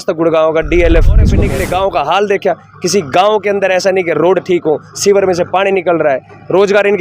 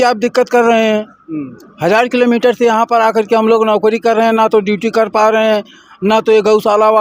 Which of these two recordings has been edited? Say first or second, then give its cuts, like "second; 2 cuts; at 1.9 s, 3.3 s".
first; 1 cut; at 1.4 s